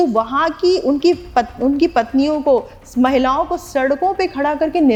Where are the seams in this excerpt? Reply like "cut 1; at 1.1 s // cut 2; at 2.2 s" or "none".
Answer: none